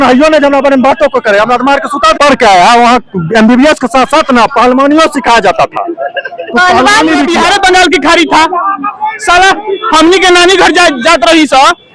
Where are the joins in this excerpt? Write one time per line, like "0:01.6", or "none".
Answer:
0:02.1
0:07.3